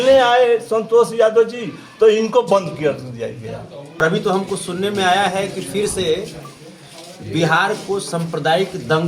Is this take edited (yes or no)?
yes